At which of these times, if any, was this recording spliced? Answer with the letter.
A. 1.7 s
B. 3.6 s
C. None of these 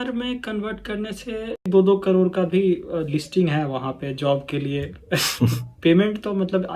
A